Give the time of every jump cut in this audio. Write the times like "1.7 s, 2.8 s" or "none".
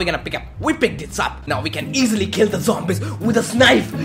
1.4 s